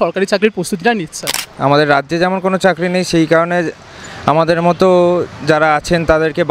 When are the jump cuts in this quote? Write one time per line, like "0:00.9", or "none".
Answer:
0:01.5